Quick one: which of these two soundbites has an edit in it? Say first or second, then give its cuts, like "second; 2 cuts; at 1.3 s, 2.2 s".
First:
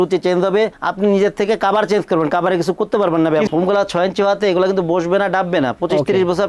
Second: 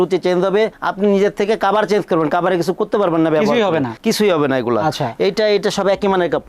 first; 1 cut; at 3.5 s